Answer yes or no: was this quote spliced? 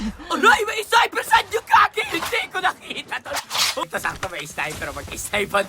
yes